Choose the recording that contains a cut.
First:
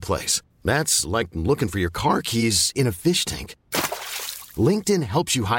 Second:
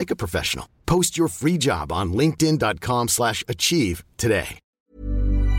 second; 1 cut; at 4.6 s

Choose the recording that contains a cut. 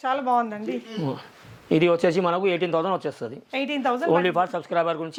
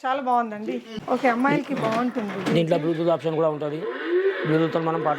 second; 1 cut; at 0.9 s

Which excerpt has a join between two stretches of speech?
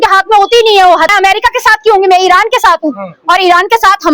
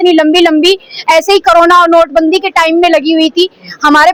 first; 1 cut; at 1.1 s

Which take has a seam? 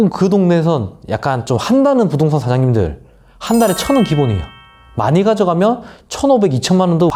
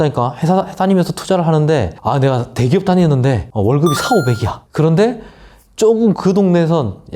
second; 3 cuts; at 1.9 s, 3.5 s, 4.6 s

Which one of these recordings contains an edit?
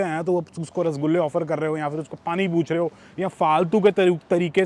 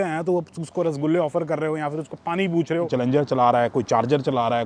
second; 1 cut; at 2.9 s

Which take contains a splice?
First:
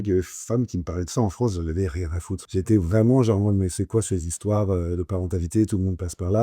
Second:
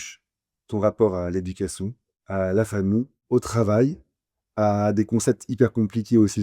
first; 1 cut; at 2.4 s

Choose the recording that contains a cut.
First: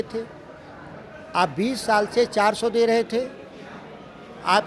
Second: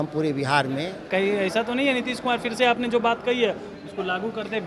second; 1 cut; at 1.1 s

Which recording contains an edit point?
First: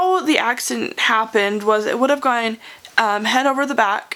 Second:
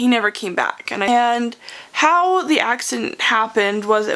second; 1 cut; at 1.1 s

